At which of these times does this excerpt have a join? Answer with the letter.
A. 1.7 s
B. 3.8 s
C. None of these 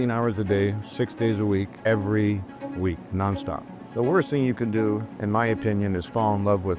B